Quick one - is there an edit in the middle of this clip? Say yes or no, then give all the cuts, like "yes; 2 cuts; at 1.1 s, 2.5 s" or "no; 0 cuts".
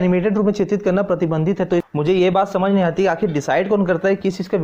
yes; 1 cut; at 1.9 s